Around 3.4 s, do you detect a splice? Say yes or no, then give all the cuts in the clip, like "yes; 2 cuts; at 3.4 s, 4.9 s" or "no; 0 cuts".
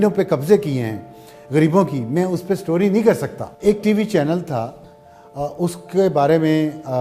yes; 1 cut; at 3.4 s